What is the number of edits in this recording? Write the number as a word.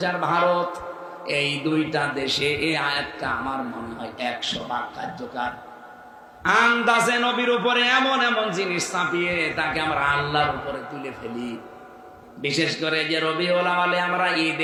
zero